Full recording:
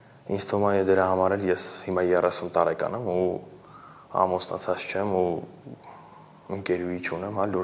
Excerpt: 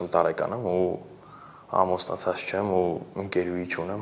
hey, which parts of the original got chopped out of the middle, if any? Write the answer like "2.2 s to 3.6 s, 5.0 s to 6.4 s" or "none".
5.5 s to 6.4 s